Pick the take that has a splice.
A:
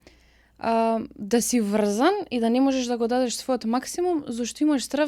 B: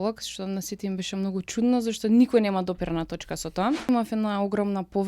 B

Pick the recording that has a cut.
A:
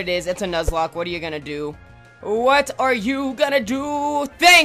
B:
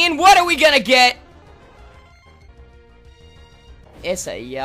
B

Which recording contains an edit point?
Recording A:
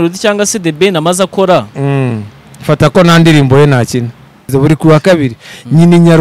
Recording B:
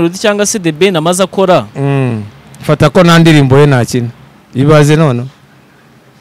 A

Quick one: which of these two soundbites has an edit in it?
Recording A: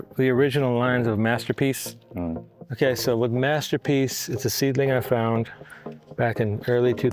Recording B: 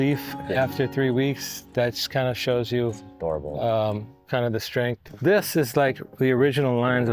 B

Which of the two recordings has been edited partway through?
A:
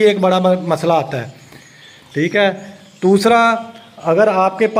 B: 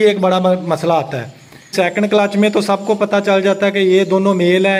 B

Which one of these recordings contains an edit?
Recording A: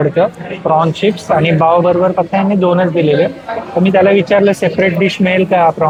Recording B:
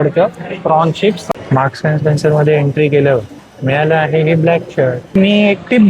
B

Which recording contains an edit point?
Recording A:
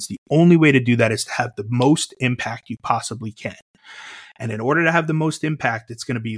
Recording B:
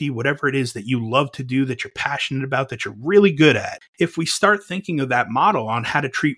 B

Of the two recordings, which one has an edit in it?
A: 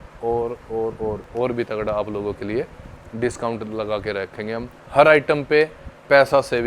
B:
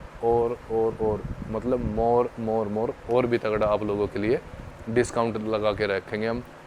A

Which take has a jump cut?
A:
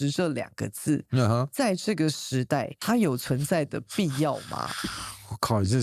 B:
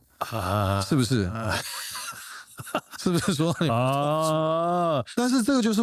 A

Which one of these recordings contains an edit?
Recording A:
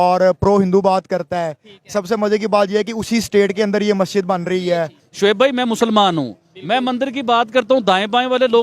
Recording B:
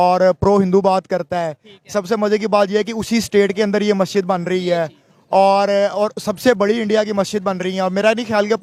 A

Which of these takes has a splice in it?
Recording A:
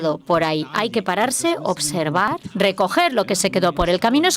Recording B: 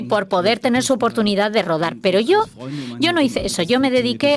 A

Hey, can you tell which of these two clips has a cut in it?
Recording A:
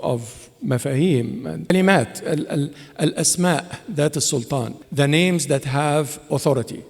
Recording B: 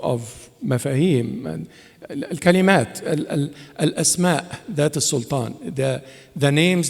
A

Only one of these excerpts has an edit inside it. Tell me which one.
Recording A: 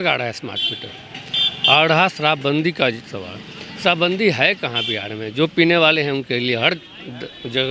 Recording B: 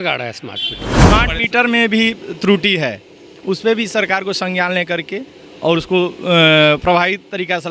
B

